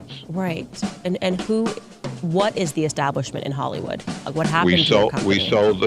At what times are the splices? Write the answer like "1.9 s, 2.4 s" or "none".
4.3 s